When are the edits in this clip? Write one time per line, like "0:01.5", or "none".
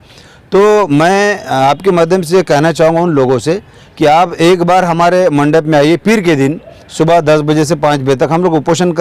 none